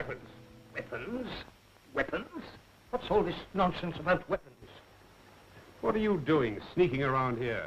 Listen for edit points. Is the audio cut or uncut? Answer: cut